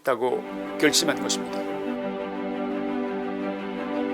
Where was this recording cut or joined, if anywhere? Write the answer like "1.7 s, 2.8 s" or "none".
1.3 s